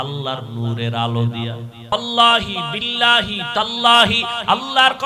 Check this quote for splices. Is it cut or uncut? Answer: cut